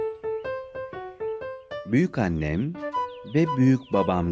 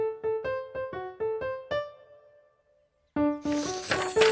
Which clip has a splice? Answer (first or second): second